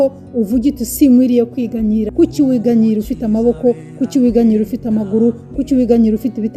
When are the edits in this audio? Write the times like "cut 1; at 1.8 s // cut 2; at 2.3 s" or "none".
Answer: cut 1; at 2.1 s